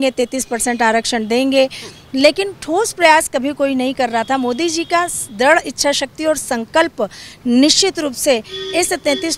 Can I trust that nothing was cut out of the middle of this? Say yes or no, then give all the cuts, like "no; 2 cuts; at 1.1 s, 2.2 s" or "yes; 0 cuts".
yes; 0 cuts